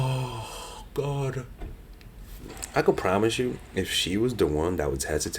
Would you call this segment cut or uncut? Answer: cut